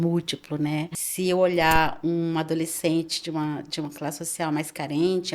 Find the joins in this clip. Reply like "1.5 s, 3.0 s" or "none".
1.0 s